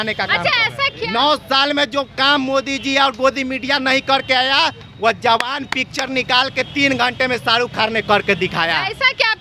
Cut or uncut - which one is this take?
cut